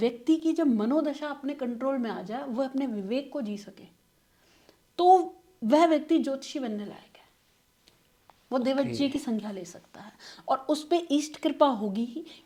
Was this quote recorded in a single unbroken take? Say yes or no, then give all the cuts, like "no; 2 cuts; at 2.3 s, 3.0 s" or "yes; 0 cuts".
yes; 0 cuts